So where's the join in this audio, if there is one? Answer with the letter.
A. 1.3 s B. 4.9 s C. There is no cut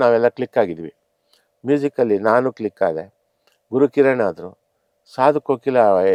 C